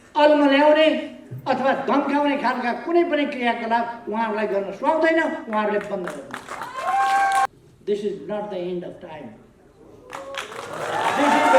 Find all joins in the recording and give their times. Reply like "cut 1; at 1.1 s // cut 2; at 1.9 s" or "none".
cut 1; at 7.5 s